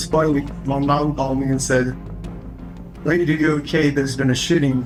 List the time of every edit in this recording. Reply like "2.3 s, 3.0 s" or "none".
none